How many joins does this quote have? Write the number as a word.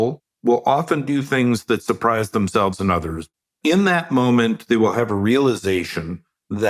one